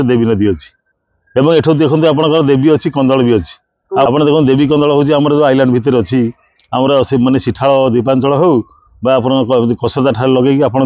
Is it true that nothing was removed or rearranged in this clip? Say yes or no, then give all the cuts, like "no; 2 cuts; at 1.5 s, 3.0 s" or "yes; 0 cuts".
yes; 0 cuts